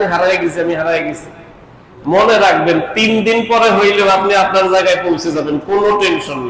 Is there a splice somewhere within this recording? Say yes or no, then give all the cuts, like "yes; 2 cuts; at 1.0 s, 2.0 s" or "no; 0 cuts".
no; 0 cuts